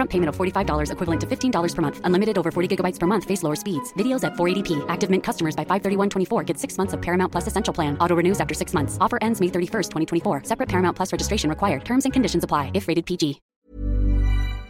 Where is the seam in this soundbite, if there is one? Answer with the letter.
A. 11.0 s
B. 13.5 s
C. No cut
B